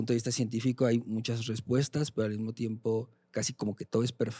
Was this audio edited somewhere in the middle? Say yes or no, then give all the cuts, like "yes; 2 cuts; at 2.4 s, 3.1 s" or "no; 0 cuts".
no; 0 cuts